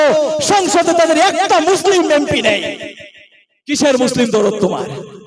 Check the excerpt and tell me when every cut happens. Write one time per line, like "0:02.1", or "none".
none